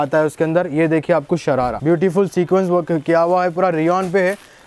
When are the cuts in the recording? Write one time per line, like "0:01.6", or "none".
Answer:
0:01.8

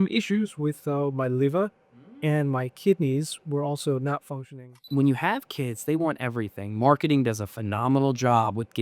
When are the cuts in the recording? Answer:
0:04.9

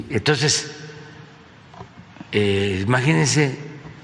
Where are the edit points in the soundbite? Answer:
0:01.1

